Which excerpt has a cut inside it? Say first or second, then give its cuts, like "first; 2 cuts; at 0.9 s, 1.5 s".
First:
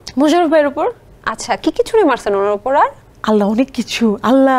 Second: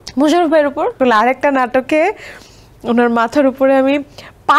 second; 1 cut; at 1.0 s